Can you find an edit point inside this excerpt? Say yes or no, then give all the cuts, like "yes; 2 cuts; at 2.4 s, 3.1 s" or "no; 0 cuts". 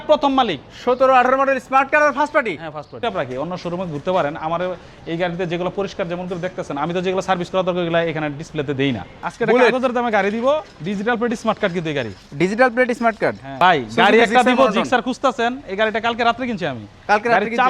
yes; 3 cuts; at 3.0 s, 9.1 s, 13.5 s